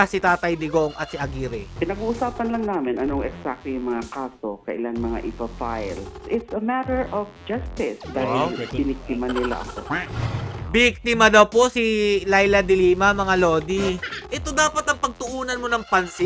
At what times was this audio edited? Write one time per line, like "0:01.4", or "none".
0:01.7
0:08.0
0:14.2